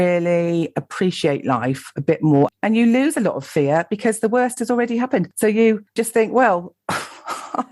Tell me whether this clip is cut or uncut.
cut